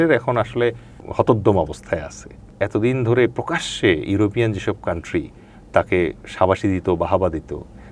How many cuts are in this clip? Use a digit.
2